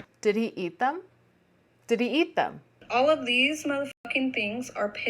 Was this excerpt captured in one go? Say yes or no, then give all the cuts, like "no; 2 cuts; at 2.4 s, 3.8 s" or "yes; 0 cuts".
no; 1 cut; at 2.8 s